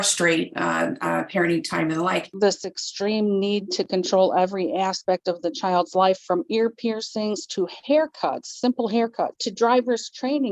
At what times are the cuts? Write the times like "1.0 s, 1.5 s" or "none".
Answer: 2.3 s, 9.4 s